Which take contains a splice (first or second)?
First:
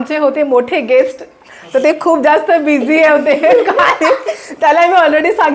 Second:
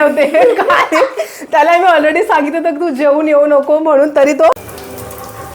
second